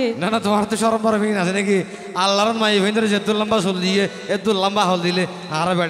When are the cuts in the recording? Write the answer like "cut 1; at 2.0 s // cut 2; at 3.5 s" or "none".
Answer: none